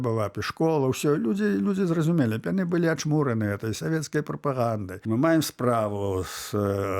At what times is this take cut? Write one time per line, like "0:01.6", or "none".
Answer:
0:05.0